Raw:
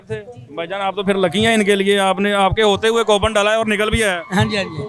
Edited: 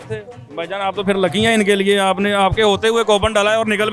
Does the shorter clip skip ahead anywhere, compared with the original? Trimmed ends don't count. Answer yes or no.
no